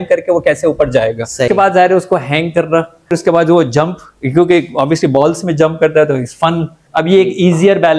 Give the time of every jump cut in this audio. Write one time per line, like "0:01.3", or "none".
0:01.5
0:03.1
0:06.8